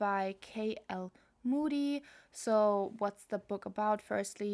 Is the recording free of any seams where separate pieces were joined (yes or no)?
yes